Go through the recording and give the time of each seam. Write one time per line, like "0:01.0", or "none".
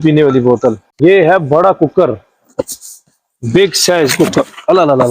0:00.9